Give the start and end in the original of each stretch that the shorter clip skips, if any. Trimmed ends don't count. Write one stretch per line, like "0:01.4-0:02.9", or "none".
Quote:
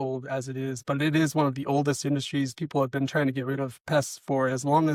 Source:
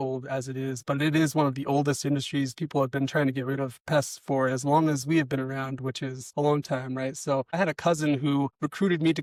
none